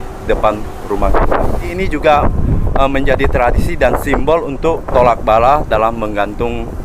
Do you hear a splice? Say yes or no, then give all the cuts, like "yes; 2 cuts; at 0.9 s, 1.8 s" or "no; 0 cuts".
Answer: yes; 2 cuts; at 1.7 s, 4.8 s